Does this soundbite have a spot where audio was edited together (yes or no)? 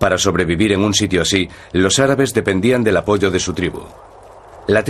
yes